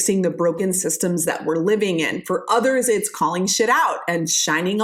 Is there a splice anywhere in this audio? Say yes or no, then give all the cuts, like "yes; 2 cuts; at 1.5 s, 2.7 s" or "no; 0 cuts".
no; 0 cuts